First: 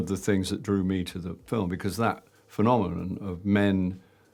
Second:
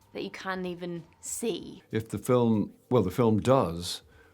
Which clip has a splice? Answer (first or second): second